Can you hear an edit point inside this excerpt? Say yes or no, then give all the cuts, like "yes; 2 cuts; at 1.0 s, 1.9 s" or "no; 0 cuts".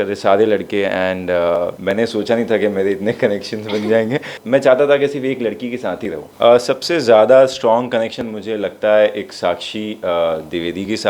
yes; 3 cuts; at 1.8 s, 4.4 s, 6.2 s